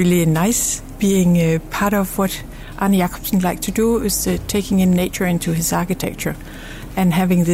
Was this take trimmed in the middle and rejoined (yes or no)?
no